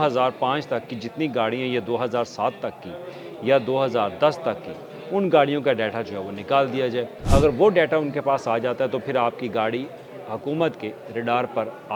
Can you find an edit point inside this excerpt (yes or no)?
yes